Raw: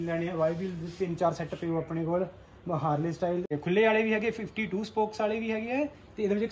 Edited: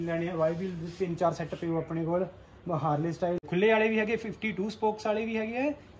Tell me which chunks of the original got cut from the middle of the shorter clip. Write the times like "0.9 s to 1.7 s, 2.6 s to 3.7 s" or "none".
3.4 s to 3.6 s